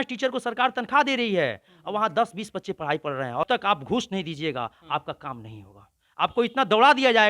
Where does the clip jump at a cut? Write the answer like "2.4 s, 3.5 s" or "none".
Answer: 3.5 s